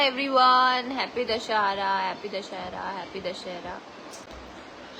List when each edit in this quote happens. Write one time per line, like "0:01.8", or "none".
0:04.0